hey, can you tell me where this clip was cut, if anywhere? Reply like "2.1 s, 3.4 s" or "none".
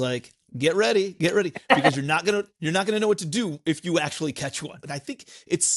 4.8 s